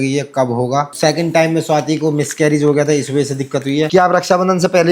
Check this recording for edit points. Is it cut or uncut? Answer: cut